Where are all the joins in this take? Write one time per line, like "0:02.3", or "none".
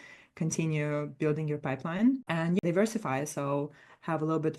0:02.6

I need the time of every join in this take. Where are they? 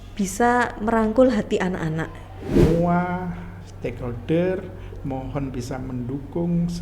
0:02.5

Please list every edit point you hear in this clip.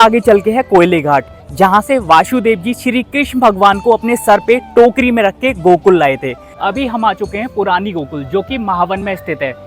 0:06.5

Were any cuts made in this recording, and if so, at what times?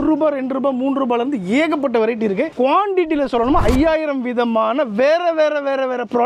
0:02.5

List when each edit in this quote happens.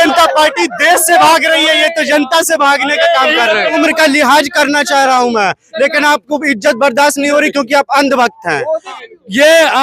0:03.8
0:08.9

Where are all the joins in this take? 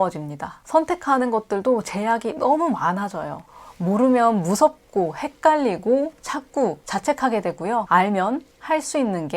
0:03.4
0:07.9

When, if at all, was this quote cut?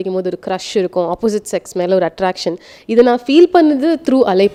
none

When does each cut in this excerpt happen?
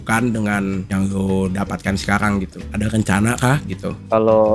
0:00.8
0:02.6

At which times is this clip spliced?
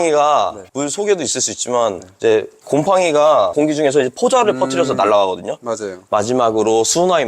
0:02.5
0:03.5
0:05.9

